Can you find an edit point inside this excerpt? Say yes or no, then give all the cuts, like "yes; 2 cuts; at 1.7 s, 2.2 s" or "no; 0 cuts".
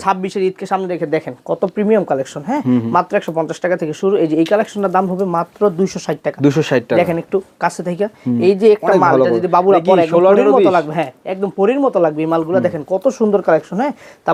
no; 0 cuts